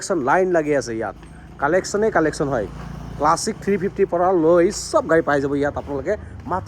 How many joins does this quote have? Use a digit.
0